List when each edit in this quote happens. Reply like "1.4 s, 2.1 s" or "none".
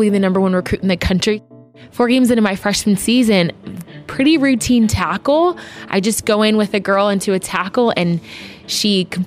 1.4 s